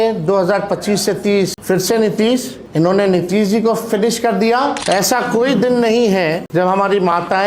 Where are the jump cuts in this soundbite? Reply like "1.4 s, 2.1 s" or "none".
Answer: 1.6 s, 2.6 s, 4.8 s, 6.4 s